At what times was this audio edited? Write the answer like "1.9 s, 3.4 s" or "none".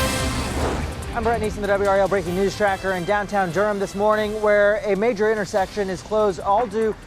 1.0 s

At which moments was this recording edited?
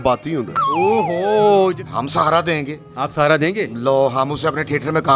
1.7 s

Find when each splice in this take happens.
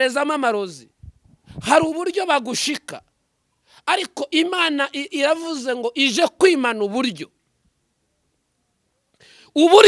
none

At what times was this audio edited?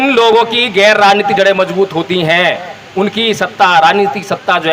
none

